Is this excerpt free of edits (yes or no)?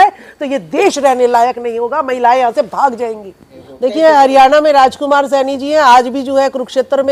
yes